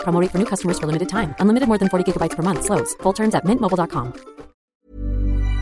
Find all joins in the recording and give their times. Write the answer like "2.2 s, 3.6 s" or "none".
4.7 s